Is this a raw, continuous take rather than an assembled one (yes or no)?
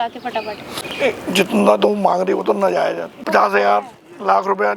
no